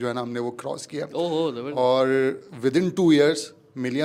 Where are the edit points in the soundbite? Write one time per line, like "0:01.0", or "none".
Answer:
none